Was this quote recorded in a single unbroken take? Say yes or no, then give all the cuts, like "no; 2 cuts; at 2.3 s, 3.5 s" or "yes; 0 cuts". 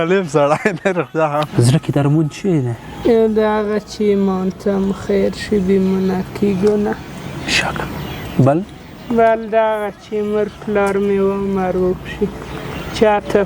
no; 2 cuts; at 1.5 s, 2.8 s